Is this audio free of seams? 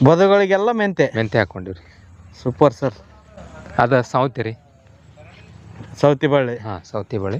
yes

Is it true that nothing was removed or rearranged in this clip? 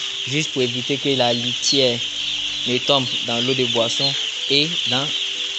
yes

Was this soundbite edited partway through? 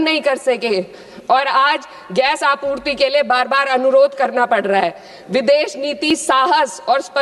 no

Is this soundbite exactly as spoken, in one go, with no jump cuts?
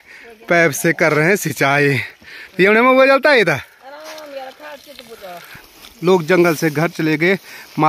no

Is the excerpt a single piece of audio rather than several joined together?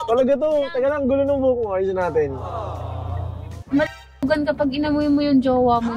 no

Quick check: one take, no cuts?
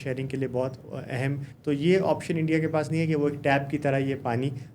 no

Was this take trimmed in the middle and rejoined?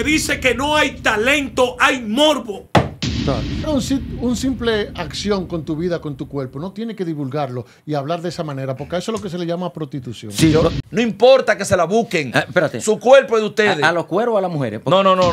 yes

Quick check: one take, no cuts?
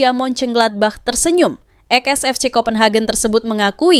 yes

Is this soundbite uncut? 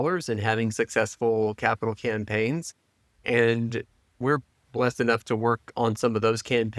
yes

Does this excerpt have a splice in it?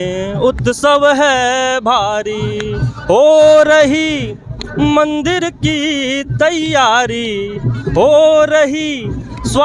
no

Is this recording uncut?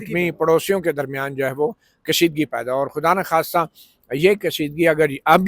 yes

